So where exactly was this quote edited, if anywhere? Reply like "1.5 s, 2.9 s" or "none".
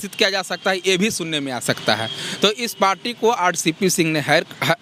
none